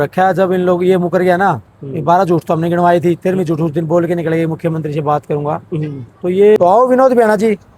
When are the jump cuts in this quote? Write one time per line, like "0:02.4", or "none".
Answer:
0:06.6